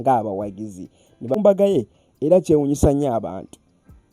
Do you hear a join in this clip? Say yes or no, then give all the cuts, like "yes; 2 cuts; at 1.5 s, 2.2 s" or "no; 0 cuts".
yes; 1 cut; at 1.4 s